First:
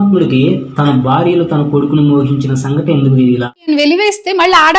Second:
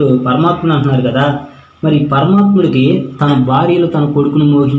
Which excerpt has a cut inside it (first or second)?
first